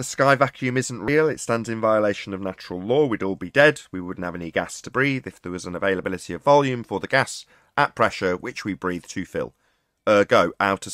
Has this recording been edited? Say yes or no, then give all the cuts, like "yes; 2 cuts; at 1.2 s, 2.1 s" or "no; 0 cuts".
no; 0 cuts